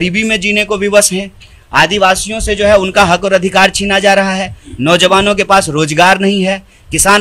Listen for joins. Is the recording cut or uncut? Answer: uncut